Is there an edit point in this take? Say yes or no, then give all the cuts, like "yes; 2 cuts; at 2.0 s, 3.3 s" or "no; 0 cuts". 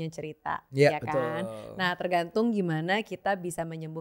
no; 0 cuts